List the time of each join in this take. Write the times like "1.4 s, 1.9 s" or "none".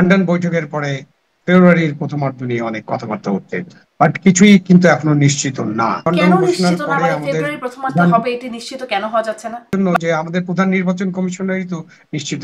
6.1 s, 9.7 s